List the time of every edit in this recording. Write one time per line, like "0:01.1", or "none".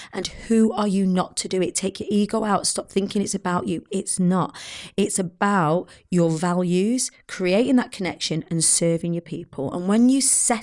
none